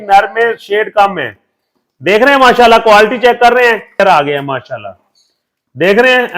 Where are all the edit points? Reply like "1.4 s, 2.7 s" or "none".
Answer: 4.0 s